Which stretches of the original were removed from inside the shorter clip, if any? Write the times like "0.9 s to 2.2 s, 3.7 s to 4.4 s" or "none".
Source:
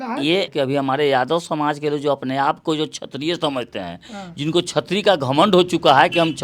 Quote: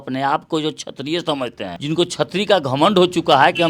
3.9 s to 4.3 s